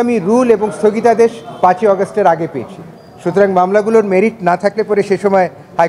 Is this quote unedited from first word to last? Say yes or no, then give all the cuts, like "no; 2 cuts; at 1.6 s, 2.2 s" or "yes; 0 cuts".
yes; 0 cuts